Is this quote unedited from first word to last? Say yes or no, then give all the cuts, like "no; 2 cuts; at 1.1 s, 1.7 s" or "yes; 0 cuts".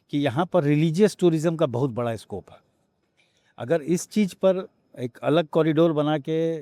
yes; 0 cuts